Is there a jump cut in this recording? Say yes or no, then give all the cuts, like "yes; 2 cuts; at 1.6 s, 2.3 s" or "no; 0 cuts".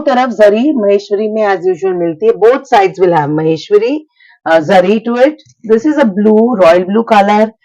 no; 0 cuts